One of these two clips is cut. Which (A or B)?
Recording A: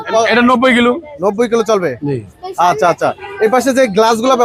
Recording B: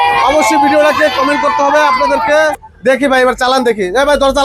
B